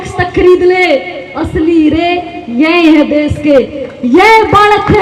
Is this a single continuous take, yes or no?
yes